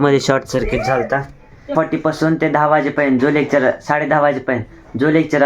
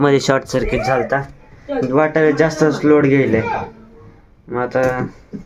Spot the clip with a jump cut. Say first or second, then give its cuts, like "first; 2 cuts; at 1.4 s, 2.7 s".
first; 1 cut; at 1.7 s